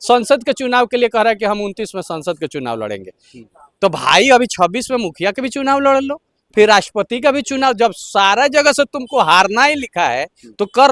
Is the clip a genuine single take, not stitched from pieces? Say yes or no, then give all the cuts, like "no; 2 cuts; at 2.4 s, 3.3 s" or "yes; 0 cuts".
yes; 0 cuts